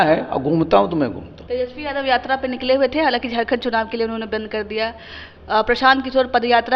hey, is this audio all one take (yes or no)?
no